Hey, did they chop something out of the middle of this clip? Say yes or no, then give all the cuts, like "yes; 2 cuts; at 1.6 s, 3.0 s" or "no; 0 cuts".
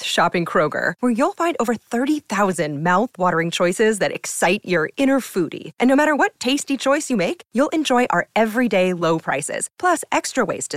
no; 0 cuts